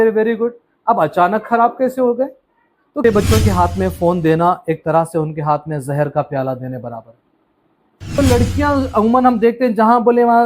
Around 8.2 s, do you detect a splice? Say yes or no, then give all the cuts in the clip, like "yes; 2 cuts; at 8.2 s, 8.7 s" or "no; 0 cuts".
yes; 2 cuts; at 3.0 s, 8.2 s